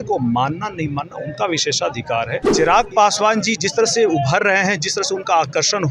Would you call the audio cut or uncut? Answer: cut